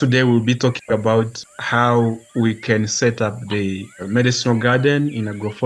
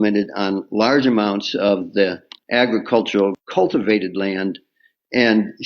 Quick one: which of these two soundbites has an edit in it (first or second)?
first